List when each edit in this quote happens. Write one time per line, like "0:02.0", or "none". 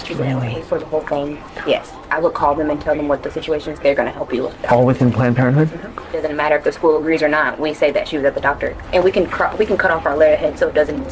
0:06.3
0:08.8